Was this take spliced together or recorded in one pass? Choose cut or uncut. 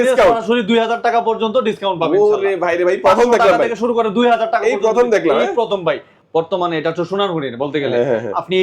cut